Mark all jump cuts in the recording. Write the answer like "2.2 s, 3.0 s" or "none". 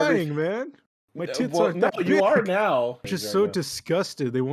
3.0 s